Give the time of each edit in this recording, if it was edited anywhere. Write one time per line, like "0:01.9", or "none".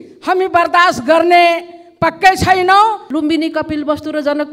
0:03.0